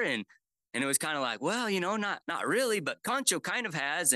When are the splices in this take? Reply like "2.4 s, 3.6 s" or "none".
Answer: 2.2 s